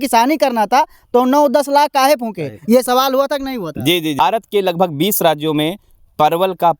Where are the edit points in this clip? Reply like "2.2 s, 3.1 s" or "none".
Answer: 4.2 s